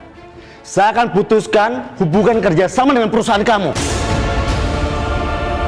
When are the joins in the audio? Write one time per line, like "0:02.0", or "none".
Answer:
none